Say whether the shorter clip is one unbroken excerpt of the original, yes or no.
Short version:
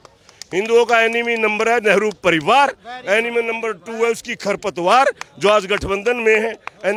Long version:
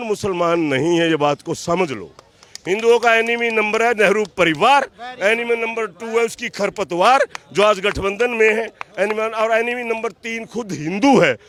yes